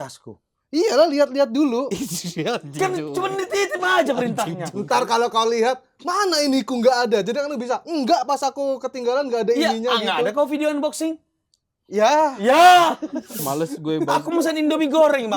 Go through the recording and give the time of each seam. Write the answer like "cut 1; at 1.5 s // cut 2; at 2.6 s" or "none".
cut 1; at 13.4 s